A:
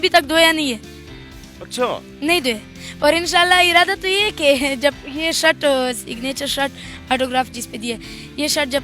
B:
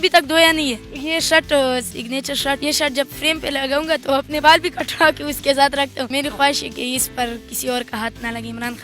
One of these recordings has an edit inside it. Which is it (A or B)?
B